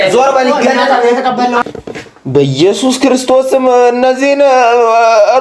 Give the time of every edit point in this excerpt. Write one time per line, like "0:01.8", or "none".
0:01.6